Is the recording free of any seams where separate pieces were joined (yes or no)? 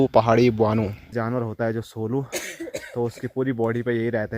no